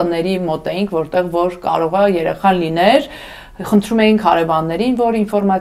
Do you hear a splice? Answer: no; 0 cuts

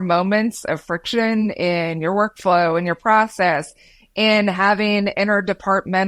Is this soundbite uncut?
yes; 0 cuts

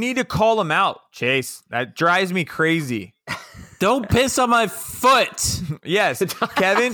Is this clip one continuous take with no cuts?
yes; 0 cuts

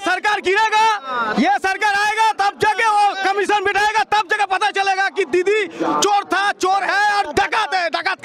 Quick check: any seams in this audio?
no; 0 cuts

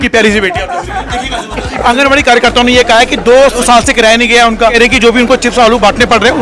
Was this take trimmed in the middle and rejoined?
yes; 3 cuts; at 1.7 s, 3.6 s, 4.7 s

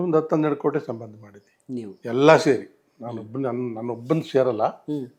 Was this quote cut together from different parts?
no; 0 cuts

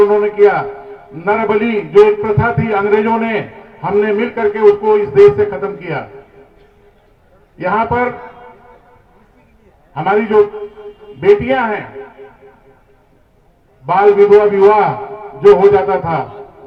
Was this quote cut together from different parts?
no; 0 cuts

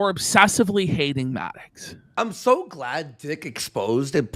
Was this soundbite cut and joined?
yes; 1 cut; at 2.1 s

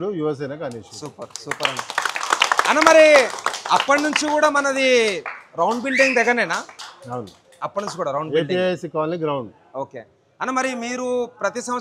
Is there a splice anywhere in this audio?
no; 0 cuts

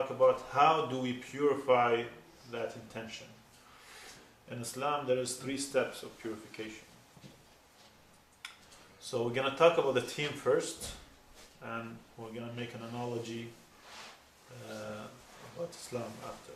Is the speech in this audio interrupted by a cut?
no; 0 cuts

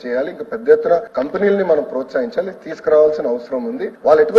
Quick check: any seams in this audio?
yes; 1 cut; at 1.1 s

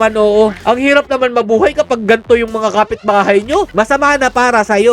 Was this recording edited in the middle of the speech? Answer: yes; 1 cut; at 3.7 s

